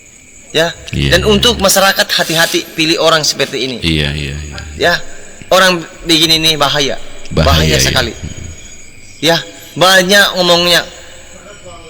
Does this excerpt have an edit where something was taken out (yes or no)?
no